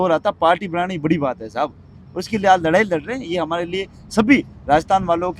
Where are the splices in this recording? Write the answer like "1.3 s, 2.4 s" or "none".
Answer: none